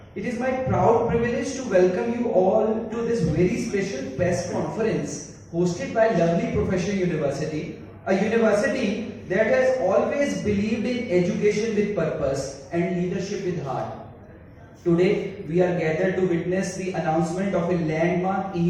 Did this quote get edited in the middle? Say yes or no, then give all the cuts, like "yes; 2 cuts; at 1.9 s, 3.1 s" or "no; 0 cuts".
no; 0 cuts